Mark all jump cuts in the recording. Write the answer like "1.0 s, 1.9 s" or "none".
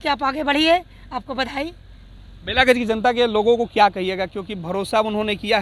none